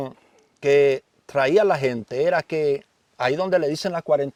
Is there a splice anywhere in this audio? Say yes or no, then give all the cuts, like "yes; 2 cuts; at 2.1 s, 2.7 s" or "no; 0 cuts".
no; 0 cuts